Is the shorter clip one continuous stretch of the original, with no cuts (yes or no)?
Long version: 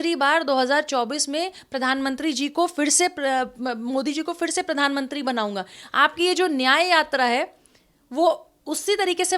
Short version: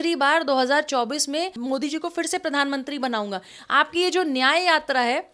no